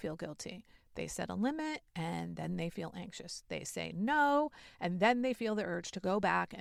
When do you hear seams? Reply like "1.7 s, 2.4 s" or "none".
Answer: none